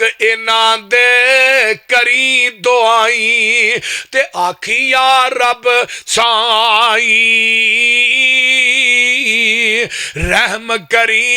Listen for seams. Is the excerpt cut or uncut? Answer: uncut